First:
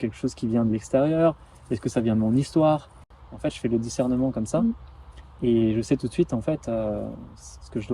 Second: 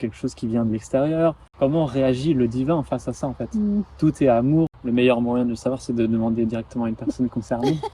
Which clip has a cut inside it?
second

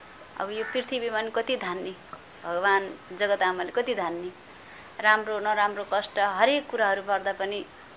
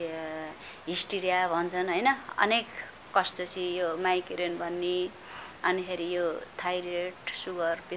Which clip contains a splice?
second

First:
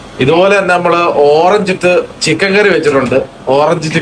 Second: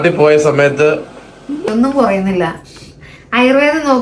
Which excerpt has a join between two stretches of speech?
second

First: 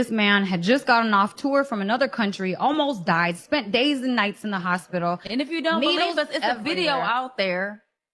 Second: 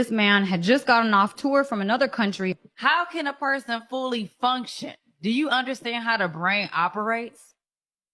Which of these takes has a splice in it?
second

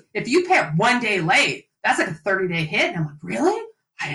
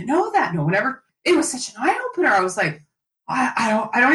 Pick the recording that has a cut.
second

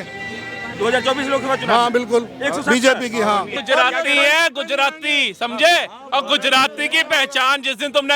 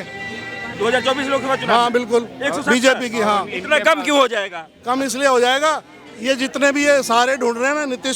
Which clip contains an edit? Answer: first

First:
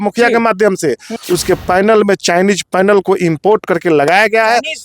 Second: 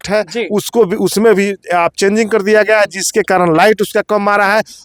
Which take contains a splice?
first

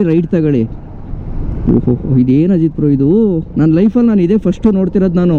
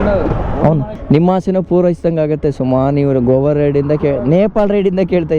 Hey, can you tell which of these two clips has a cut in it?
second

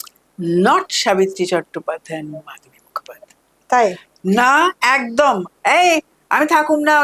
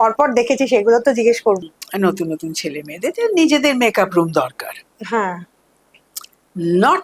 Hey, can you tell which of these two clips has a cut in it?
second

